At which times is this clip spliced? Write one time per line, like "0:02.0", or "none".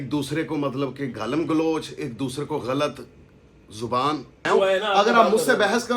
0:04.5